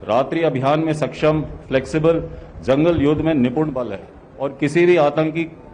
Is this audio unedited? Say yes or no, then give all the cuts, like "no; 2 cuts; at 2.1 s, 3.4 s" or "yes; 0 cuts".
yes; 0 cuts